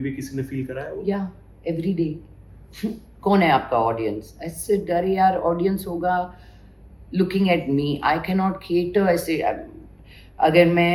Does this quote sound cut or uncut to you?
uncut